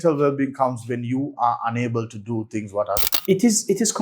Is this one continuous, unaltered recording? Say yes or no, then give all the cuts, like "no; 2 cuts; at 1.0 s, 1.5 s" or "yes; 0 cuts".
no; 1 cut; at 3.1 s